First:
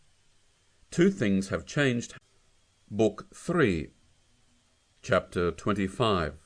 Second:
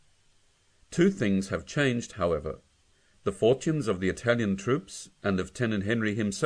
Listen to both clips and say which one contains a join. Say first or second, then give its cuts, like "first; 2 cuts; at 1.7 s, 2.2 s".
second; 1 cut; at 2.1 s